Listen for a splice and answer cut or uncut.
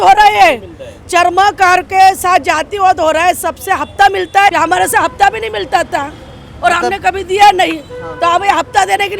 cut